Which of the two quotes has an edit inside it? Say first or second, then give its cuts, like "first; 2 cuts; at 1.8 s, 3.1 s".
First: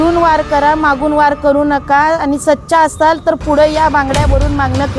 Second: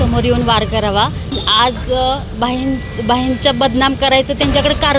second; 1 cut; at 1.4 s